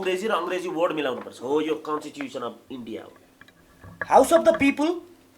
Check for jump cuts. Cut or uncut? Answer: cut